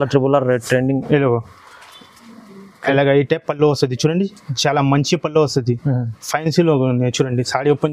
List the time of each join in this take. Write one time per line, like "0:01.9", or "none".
none

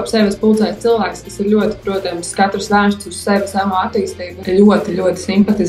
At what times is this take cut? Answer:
0:04.3

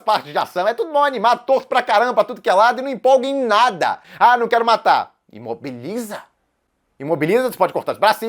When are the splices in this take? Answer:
0:04.0

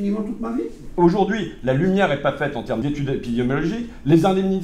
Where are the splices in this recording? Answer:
0:02.8

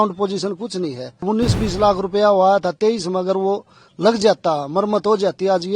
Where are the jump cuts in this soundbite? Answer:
0:01.2

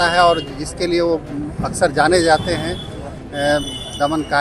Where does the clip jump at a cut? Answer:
none

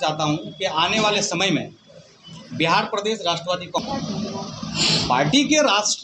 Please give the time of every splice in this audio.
0:03.8

